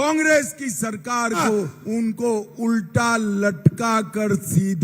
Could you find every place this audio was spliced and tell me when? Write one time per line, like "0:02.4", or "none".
0:01.8